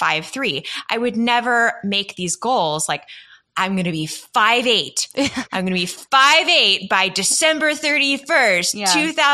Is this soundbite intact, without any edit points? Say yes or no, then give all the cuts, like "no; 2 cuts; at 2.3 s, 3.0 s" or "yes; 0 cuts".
yes; 0 cuts